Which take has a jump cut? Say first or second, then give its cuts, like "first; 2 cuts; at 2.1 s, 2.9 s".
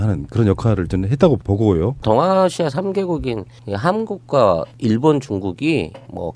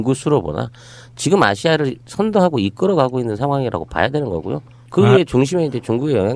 first; 1 cut; at 3.1 s